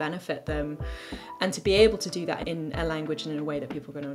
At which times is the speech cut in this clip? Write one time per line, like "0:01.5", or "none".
0:02.4